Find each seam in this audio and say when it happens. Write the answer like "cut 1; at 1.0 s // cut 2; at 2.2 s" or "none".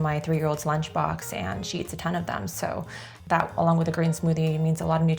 cut 1; at 3.1 s